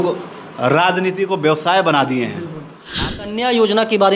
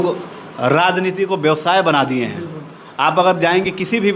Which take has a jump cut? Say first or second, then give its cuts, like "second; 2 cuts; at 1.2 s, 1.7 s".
first; 1 cut; at 3.0 s